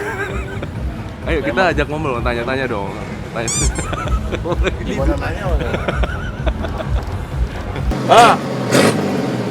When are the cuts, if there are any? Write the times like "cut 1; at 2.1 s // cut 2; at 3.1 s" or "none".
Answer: cut 1; at 7.9 s